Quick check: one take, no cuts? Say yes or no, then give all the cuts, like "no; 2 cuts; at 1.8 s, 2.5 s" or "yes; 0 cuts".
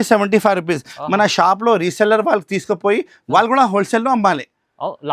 yes; 0 cuts